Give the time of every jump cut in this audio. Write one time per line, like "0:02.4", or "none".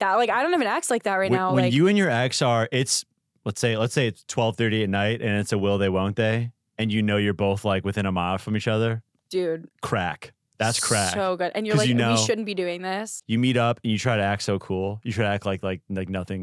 0:09.7
0:13.2